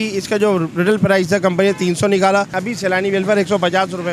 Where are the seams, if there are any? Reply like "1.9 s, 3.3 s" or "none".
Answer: 2.6 s